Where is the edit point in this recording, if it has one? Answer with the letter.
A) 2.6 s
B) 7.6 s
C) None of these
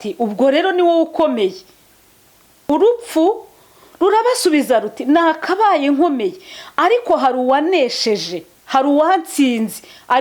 A